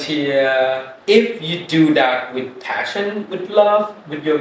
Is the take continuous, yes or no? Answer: yes